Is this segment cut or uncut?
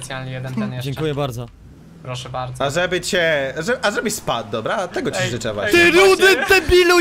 uncut